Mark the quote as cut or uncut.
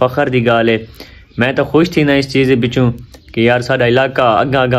uncut